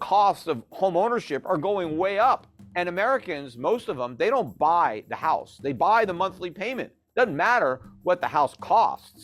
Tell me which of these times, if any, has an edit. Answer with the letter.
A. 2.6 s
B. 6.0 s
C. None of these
A